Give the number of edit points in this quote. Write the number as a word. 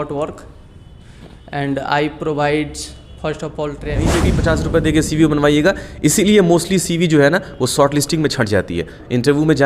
one